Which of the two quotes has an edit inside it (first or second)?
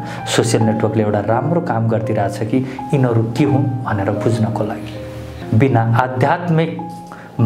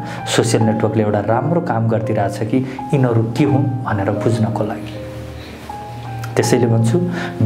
first